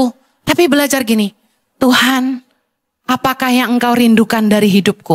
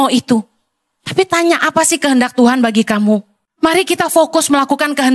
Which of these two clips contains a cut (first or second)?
second